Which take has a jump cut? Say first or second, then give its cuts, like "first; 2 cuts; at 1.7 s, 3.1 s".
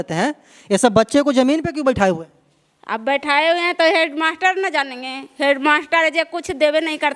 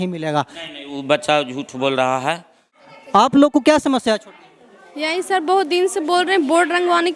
second; 1 cut; at 2.6 s